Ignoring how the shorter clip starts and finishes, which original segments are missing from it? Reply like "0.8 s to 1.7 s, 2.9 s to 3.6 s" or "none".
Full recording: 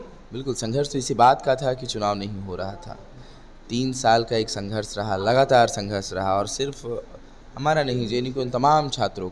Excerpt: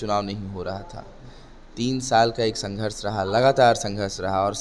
none